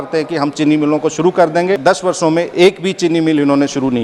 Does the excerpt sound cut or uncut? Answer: cut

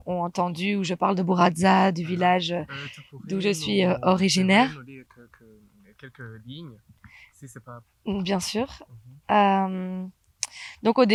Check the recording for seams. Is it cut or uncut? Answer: uncut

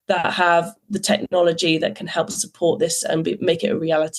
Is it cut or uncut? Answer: uncut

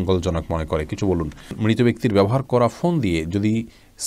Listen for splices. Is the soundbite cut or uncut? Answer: cut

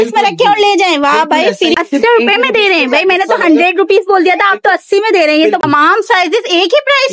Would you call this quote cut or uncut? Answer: cut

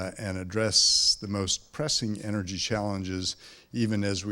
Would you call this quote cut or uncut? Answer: cut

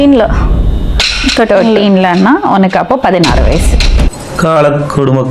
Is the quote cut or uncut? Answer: uncut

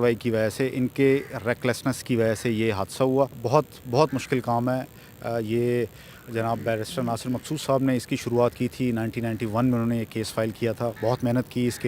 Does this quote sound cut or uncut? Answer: cut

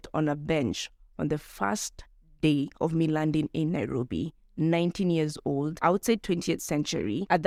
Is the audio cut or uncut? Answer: uncut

